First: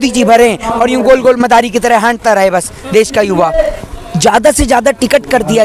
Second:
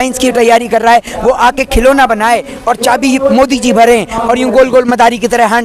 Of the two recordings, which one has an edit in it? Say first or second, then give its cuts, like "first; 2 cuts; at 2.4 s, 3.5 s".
first; 1 cut; at 3.8 s